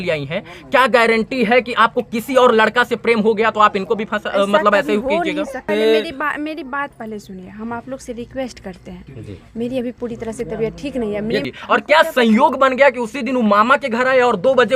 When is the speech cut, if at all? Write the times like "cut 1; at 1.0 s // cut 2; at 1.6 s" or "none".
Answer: cut 1; at 5.6 s // cut 2; at 11.5 s

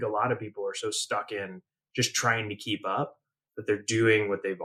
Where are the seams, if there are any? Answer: none

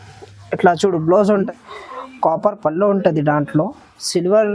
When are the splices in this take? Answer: cut 1; at 1.3 s

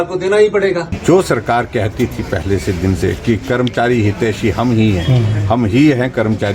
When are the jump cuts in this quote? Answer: cut 1; at 0.9 s

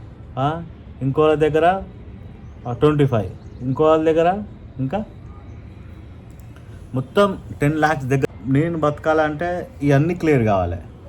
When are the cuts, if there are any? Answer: cut 1; at 8.2 s

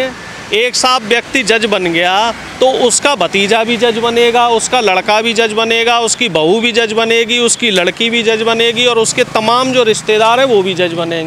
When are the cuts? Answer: none

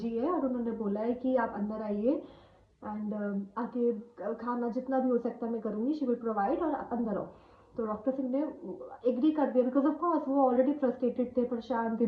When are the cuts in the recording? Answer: none

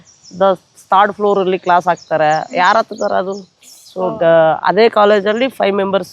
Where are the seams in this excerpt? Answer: none

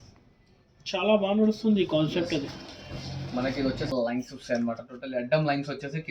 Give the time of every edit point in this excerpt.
cut 1; at 3.9 s

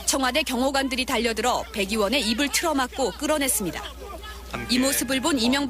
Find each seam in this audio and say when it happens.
cut 1; at 4.8 s

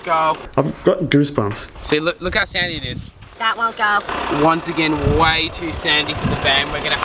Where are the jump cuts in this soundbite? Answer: none

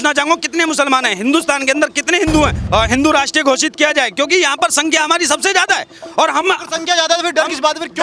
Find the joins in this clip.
cut 1; at 2.6 s

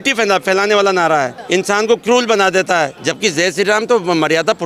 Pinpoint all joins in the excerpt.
cut 1; at 1.4 s // cut 2; at 3.0 s

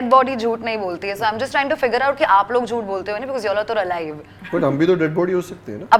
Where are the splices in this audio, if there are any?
none

